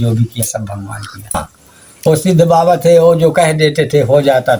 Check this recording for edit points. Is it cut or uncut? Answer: cut